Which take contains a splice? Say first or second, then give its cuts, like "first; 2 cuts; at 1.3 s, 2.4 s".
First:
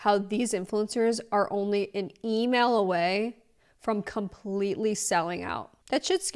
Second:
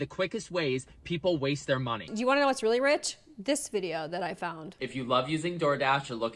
second; 2 cuts; at 2.1 s, 4.8 s